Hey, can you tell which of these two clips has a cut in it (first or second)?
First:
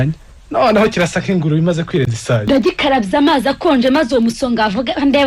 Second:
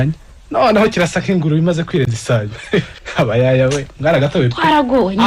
first